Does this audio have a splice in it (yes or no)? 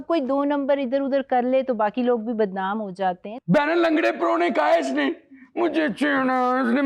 yes